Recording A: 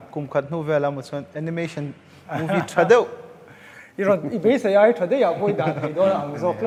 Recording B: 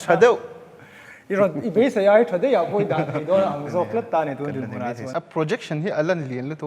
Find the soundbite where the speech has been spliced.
B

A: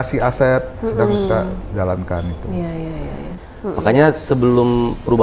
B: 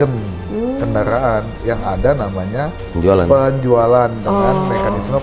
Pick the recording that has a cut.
A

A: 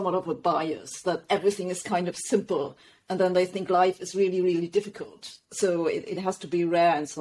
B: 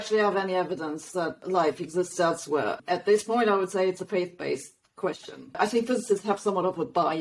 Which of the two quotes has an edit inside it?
B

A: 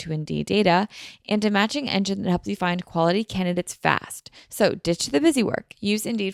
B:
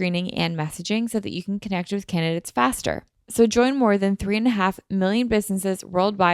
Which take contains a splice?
B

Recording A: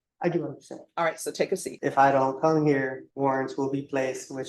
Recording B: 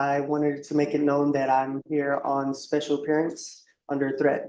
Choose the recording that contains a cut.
A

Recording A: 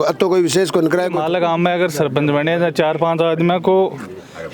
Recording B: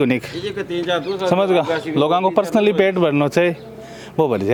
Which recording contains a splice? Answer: A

